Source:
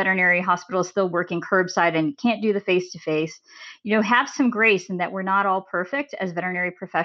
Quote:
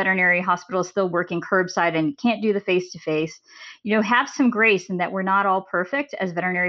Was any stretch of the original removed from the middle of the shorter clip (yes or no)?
no